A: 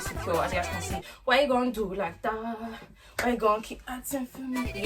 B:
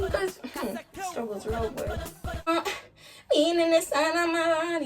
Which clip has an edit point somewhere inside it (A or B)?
B